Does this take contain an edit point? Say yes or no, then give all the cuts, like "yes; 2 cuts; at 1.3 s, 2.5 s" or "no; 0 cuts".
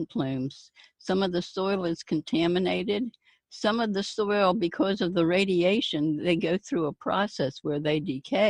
no; 0 cuts